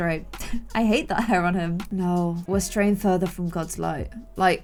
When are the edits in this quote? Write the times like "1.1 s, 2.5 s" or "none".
none